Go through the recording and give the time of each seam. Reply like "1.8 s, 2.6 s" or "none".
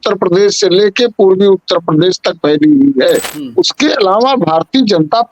3.4 s